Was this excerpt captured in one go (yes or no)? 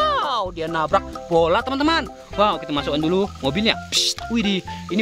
yes